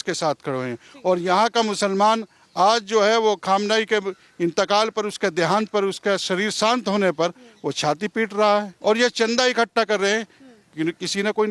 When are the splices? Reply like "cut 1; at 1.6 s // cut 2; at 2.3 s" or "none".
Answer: cut 1; at 8.7 s